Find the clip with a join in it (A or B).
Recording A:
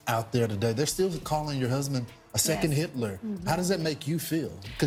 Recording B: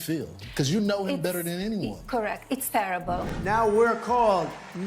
B